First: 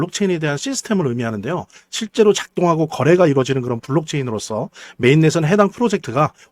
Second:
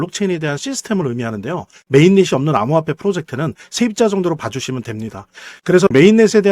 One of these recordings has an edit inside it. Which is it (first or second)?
second